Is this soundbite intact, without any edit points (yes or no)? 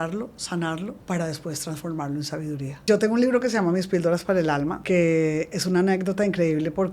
no